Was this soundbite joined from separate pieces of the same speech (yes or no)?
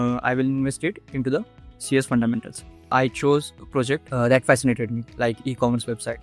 yes